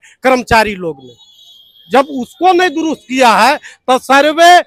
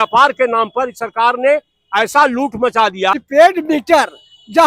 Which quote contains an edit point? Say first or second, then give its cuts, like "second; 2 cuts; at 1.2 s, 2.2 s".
second; 1 cut; at 3.1 s